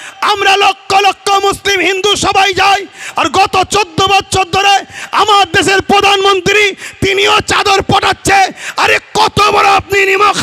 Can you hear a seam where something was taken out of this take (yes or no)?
no